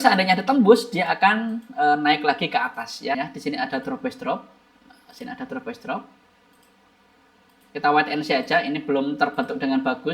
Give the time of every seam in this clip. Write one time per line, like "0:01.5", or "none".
0:03.1